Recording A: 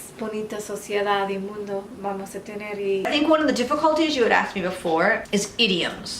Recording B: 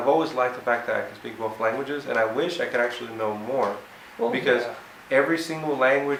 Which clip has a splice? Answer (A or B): A